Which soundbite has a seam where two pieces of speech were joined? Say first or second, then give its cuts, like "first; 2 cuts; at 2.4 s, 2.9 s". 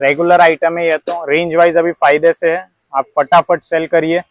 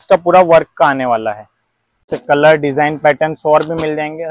second; 1 cut; at 2.1 s